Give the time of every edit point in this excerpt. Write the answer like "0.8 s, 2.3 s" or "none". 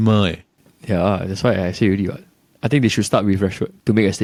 none

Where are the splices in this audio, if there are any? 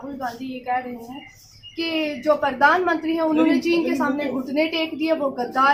none

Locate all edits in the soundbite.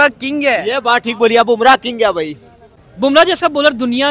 2.8 s

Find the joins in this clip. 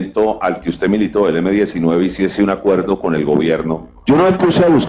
3.9 s

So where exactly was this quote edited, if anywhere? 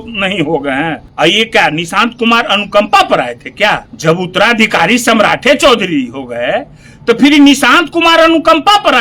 1.0 s, 3.9 s

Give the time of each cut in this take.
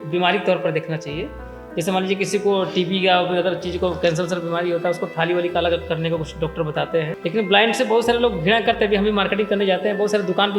7.1 s

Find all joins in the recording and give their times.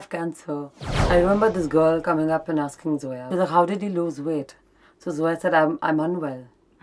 0.9 s, 3.2 s

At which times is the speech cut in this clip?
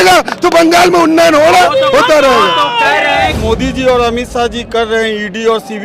3.4 s

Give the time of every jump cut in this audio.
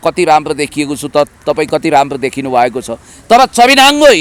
none

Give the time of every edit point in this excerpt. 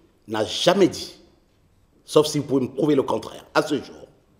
none

